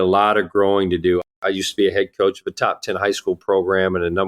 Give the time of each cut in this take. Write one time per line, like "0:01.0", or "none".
0:01.2